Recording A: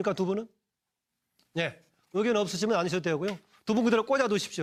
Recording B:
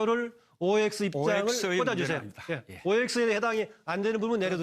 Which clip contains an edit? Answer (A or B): B